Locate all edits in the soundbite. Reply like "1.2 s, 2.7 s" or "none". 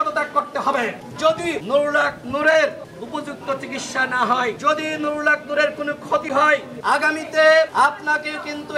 1.3 s, 2.9 s, 4.6 s, 6.7 s, 7.7 s